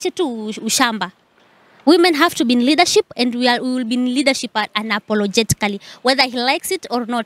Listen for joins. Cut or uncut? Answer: uncut